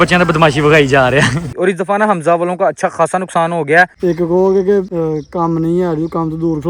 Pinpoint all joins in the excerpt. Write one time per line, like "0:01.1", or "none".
0:01.5
0:03.9
0:04.9